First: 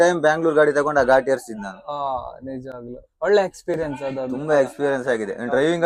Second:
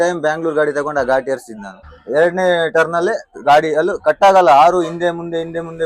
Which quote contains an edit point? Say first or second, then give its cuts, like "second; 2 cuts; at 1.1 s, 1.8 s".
second; 1 cut; at 1.9 s